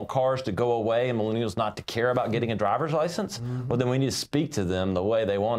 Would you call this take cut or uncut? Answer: uncut